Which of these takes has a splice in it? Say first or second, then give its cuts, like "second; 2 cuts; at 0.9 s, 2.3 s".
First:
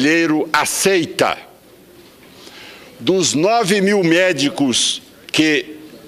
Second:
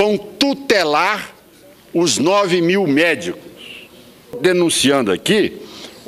second; 1 cut; at 4.4 s